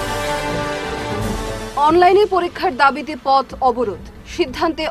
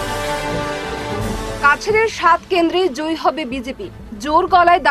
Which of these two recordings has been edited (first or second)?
second